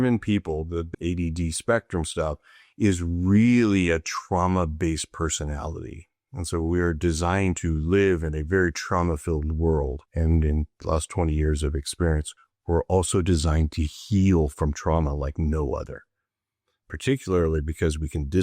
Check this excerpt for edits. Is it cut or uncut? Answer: cut